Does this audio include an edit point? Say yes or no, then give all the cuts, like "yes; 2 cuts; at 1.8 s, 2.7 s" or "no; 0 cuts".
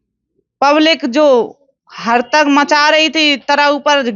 no; 0 cuts